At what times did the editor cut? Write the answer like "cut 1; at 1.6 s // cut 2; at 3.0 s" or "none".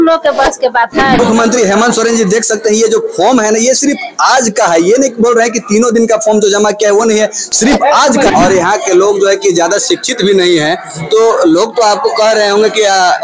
cut 1; at 1.2 s // cut 2; at 8.3 s